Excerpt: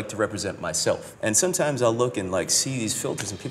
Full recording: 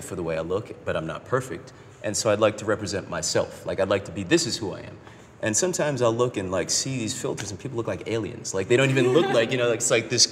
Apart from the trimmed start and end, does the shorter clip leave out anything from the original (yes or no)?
yes